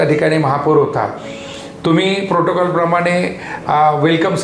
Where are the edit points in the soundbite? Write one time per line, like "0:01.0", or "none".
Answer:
none